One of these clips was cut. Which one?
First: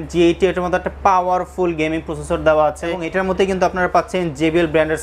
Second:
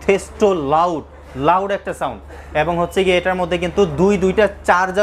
first; 1 cut; at 3.1 s

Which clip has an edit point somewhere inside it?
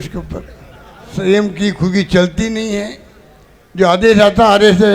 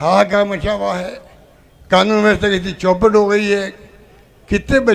first; 1 cut; at 1.1 s

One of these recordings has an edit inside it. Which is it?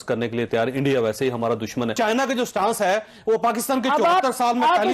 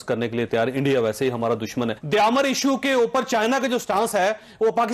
first; 1 cut; at 1.9 s

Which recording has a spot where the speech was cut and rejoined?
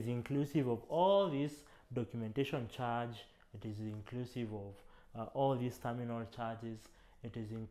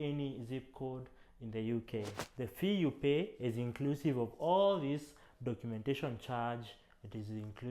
second; 1 cut; at 2.2 s

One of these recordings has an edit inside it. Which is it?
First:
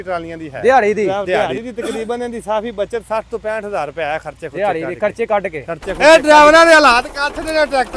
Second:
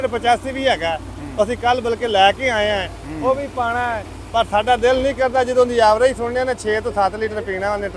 first; 2 cuts; at 1.2 s, 5.9 s

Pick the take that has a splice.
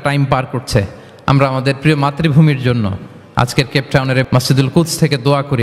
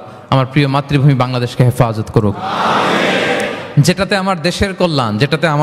first; 1 cut; at 4.2 s

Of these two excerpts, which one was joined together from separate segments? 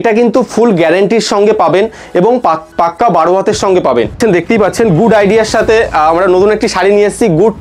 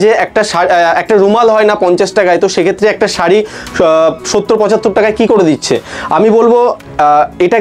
first; 1 cut; at 4.2 s

